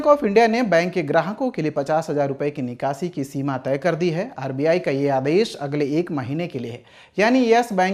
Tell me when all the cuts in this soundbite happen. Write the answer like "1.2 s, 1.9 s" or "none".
none